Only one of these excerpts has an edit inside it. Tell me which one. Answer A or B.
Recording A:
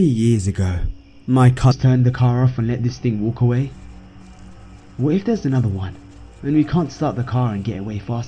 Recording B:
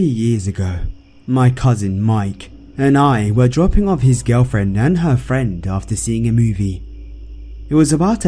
B